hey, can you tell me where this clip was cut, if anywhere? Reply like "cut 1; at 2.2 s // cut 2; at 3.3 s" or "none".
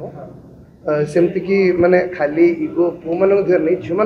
none